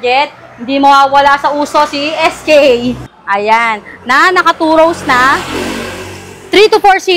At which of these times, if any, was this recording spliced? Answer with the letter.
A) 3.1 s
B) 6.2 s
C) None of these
A